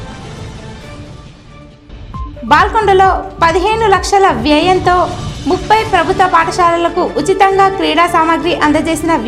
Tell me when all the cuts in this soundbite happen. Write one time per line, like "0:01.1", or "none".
0:02.3